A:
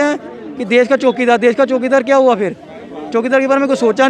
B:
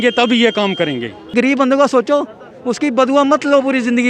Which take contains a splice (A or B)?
B